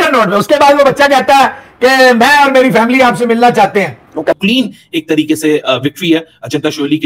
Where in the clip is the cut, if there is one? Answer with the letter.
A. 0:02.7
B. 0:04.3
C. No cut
B